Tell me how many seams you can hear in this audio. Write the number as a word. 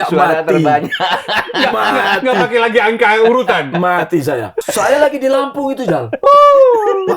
one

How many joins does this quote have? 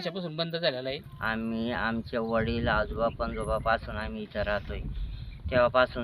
one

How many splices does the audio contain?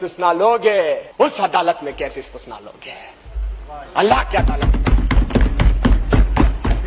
one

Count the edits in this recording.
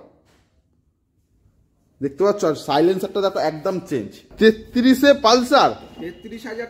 one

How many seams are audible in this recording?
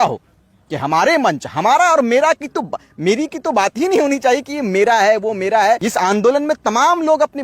one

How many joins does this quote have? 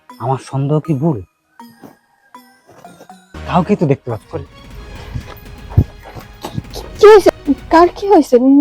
one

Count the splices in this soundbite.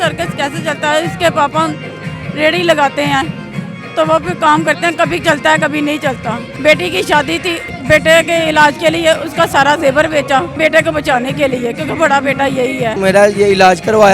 four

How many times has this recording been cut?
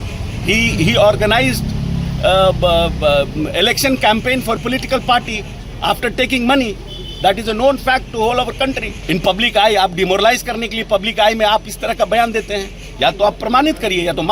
one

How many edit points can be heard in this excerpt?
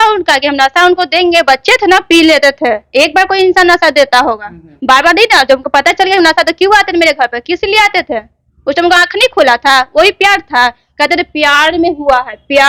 zero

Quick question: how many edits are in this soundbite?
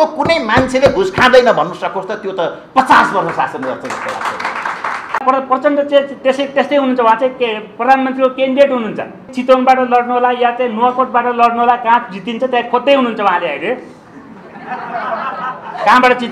two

